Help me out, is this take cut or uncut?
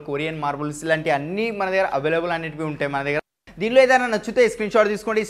uncut